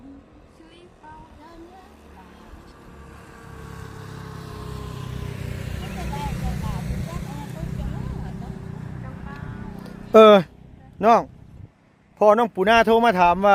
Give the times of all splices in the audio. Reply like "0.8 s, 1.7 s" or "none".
none